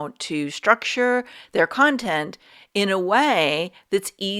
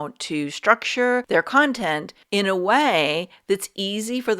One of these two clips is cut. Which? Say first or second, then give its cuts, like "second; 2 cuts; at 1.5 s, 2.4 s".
second; 2 cuts; at 1.2 s, 2.1 s